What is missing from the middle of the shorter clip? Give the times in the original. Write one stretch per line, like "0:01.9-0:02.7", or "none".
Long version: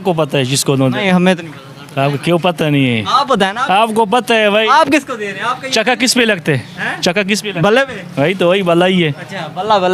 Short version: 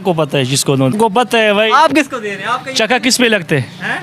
0:00.9-0:03.9